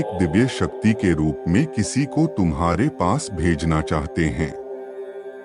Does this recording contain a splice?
yes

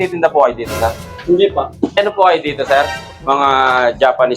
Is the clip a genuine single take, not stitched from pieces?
no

